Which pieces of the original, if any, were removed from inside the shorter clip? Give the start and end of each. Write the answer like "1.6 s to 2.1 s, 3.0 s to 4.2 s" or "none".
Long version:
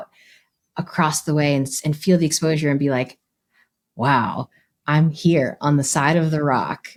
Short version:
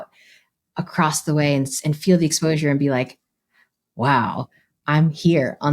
none